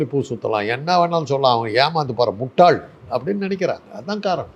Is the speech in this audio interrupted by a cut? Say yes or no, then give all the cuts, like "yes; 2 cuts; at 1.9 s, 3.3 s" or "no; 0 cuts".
no; 0 cuts